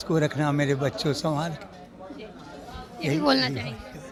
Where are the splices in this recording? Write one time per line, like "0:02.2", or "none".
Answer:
none